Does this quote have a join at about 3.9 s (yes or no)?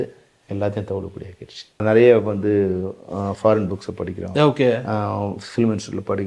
no